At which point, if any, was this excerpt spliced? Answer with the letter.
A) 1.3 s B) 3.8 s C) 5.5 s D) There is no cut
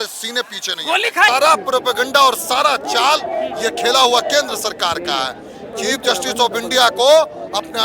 A